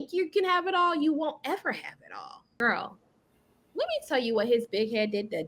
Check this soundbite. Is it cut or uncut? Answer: cut